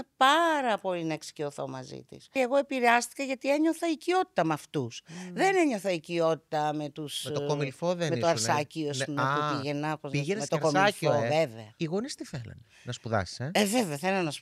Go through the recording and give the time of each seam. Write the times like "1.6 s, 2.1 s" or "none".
2.3 s, 11.6 s